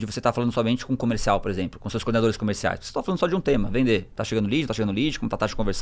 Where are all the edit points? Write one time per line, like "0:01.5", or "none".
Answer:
0:04.2